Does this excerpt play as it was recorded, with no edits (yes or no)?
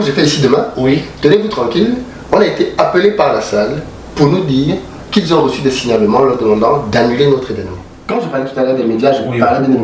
no